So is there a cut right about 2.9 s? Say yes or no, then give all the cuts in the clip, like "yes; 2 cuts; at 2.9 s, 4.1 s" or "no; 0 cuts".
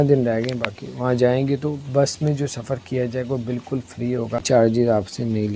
no; 1 cut; at 4.4 s